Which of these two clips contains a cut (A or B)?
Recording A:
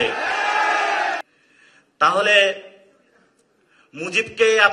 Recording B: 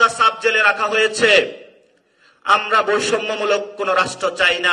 A